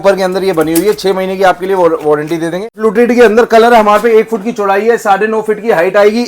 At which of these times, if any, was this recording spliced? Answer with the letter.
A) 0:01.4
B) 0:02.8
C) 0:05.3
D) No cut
B